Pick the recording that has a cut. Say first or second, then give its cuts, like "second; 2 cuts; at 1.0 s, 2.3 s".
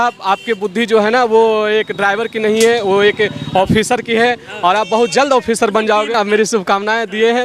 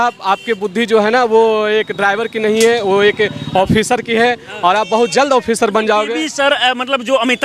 first; 1 cut; at 6.2 s